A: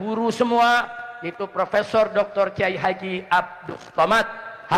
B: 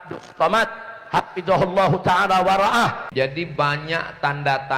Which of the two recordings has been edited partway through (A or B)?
B